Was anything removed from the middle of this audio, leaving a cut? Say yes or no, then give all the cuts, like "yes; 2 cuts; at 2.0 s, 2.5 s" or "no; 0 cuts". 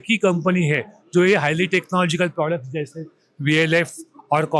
no; 0 cuts